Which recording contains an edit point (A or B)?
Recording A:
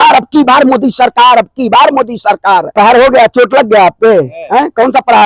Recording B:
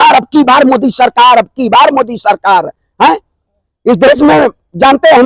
A